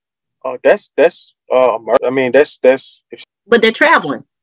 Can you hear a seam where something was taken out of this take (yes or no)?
yes